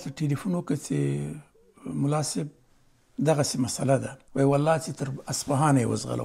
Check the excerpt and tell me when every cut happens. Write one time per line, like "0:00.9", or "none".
0:04.2